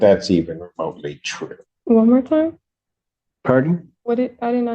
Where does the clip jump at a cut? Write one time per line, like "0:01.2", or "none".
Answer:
0:01.7